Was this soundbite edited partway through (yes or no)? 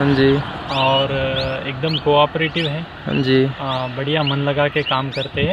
no